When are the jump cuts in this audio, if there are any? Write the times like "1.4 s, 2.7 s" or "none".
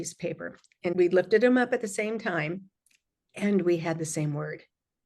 0.9 s